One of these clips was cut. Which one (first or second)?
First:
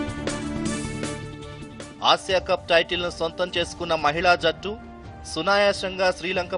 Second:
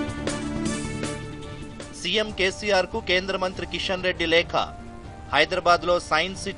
second